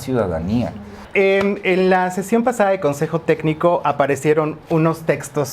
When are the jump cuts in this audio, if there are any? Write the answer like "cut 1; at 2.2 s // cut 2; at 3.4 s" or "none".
cut 1; at 0.9 s